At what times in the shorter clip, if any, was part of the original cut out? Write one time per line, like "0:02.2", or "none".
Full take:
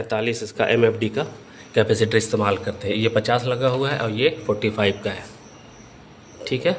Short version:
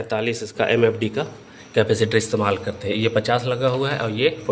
none